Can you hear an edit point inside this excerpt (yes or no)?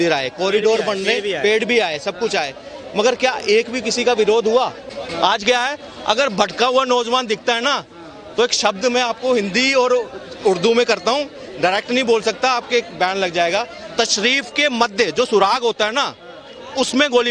yes